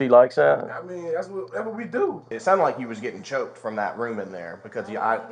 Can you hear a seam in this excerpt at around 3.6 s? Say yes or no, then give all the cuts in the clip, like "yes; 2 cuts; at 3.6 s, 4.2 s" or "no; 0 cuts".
no; 1 cut; at 2.3 s